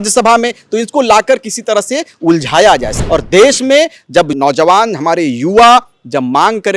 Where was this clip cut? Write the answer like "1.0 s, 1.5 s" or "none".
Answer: 3.0 s, 4.4 s